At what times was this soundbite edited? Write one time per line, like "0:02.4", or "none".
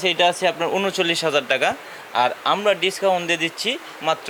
none